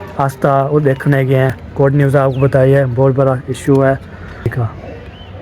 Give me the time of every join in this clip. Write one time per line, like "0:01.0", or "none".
0:01.6
0:04.5